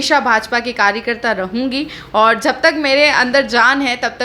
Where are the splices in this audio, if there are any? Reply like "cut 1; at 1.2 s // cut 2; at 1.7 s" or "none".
none

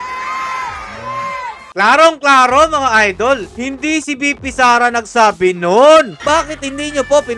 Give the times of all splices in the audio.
cut 1; at 6.1 s

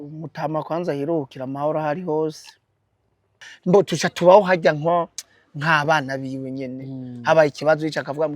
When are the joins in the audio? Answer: cut 1; at 3.5 s

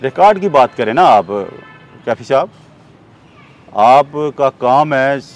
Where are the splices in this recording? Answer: none

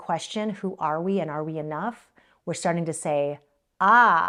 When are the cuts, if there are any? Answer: none

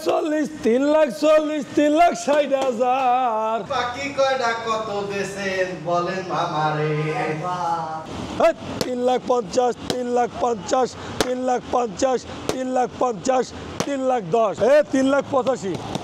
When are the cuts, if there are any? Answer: cut 1; at 8.0 s // cut 2; at 14.5 s

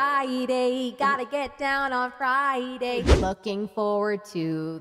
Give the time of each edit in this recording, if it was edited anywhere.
cut 1; at 3.1 s

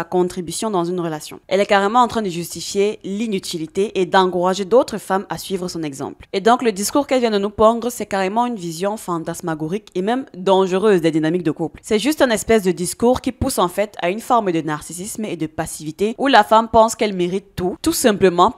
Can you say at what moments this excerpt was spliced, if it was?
cut 1; at 1.3 s // cut 2; at 6.2 s // cut 3; at 11.7 s

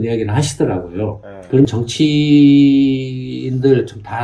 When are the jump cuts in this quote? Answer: cut 1; at 1.7 s

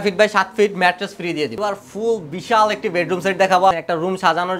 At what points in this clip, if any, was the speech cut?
cut 1; at 1.6 s // cut 2; at 3.7 s

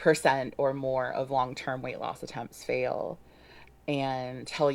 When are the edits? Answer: cut 1; at 1.9 s

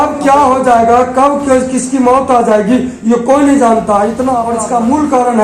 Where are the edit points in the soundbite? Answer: cut 1; at 4.5 s

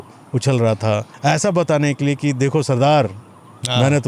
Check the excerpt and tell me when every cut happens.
cut 1; at 1.1 s

